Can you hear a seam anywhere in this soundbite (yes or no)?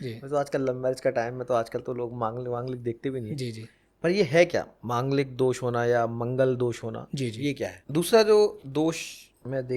yes